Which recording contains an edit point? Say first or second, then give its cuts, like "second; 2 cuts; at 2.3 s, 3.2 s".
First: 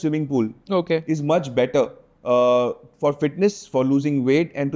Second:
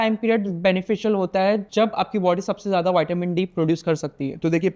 second; 1 cut; at 1.7 s